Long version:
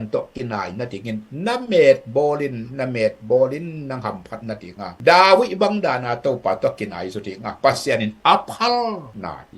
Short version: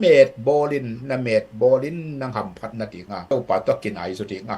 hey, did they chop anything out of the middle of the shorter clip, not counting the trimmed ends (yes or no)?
yes